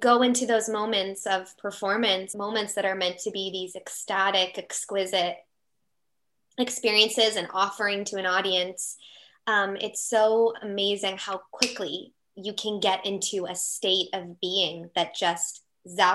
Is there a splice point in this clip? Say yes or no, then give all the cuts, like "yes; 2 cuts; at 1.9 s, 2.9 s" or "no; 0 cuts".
yes; 1 cut; at 2.3 s